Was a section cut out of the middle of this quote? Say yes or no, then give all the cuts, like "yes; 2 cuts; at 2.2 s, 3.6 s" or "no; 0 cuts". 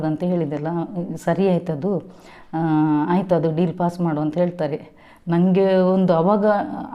no; 0 cuts